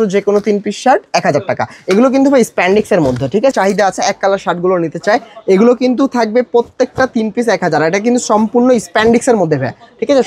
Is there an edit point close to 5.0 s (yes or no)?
no